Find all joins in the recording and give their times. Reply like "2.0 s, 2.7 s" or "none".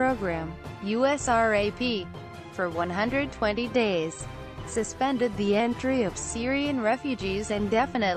4.9 s